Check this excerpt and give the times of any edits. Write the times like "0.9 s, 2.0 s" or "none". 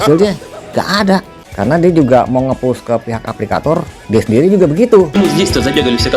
1.4 s, 5.1 s